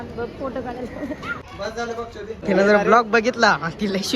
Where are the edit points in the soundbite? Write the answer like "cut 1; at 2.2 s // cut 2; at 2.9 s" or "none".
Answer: cut 1; at 1.9 s